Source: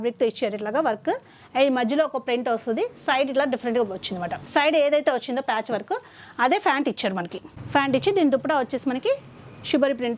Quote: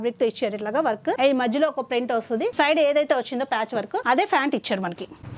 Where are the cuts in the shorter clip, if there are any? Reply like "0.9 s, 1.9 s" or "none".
1.2 s, 2.5 s, 4.0 s

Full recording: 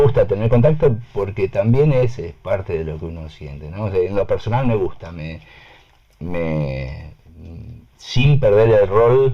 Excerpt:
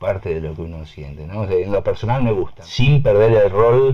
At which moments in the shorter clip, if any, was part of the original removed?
2.6 s

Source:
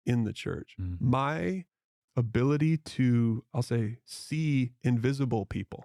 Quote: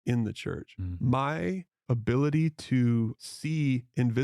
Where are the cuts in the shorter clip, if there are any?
1.7 s, 3.2 s

